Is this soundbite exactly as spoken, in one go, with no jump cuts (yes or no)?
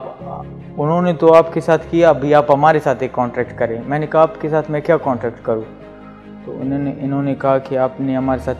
yes